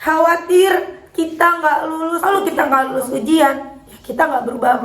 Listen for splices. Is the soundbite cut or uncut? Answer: cut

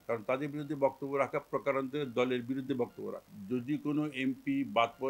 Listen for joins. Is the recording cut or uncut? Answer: cut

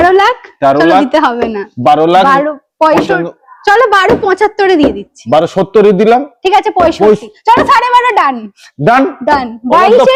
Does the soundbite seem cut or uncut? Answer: uncut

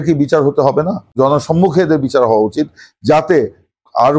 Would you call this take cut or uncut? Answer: cut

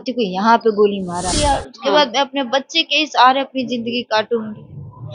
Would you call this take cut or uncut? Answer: cut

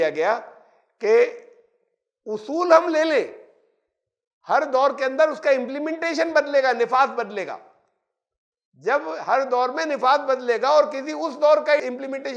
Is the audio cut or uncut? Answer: uncut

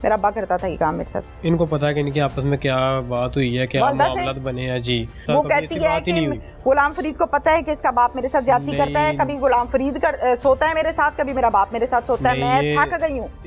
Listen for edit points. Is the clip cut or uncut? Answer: cut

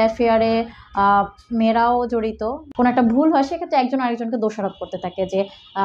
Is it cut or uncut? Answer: cut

